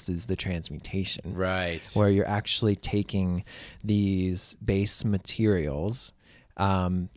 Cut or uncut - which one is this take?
uncut